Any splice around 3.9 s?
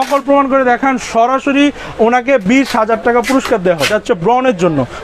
yes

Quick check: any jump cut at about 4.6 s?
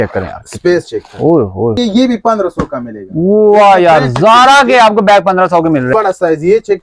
no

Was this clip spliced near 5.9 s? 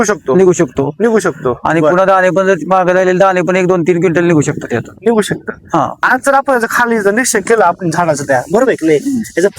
yes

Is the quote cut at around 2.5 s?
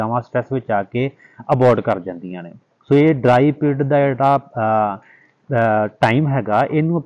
no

